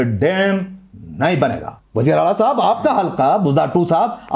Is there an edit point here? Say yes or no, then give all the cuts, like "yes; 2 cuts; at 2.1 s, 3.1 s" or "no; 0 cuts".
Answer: yes; 1 cut; at 1.7 s